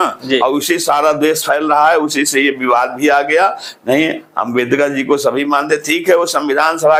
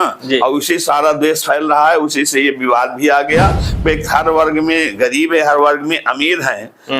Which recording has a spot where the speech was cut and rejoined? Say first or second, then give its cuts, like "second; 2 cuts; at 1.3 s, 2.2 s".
second; 1 cut; at 3.8 s